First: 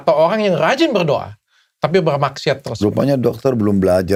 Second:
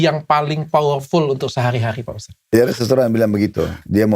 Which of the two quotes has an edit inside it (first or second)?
second